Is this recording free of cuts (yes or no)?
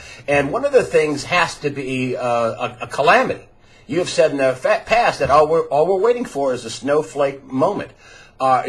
no